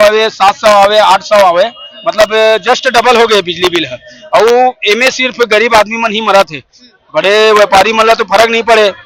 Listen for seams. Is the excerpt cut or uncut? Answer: uncut